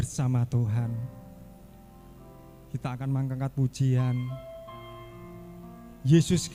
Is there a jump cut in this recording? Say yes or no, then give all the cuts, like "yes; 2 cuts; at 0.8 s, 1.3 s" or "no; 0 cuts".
no; 0 cuts